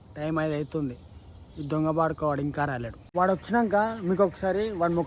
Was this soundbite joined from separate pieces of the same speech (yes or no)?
yes